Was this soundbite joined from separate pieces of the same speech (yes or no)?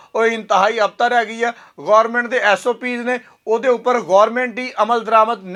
no